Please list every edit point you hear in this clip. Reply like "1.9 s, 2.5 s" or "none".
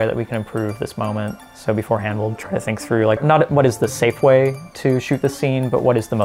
1.4 s, 3.2 s